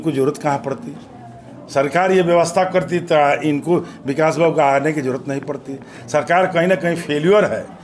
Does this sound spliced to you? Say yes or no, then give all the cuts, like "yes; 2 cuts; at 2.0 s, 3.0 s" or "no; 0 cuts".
no; 0 cuts